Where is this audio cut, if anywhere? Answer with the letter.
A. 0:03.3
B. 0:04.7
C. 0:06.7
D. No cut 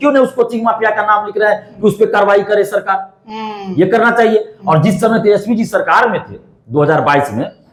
D